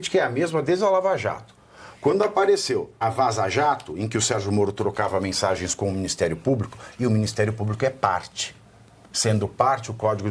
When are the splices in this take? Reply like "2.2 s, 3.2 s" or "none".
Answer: 3.0 s